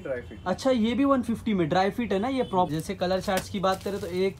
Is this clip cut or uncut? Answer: cut